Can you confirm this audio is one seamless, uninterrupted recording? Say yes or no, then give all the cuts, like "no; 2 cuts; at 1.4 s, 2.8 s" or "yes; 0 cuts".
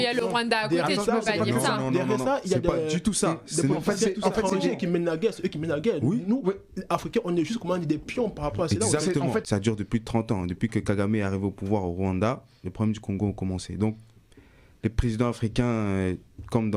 no; 1 cut; at 9.4 s